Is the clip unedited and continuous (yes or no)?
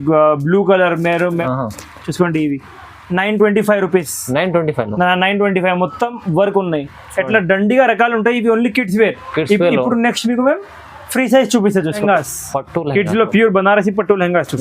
no